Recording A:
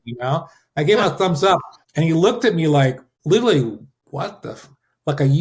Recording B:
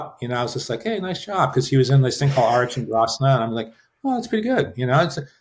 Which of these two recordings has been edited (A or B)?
A